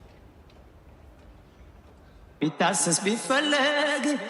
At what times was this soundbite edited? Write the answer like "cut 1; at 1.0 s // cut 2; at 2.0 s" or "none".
cut 1; at 2.2 s